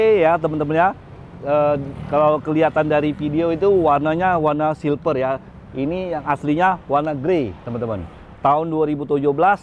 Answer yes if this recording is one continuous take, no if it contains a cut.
yes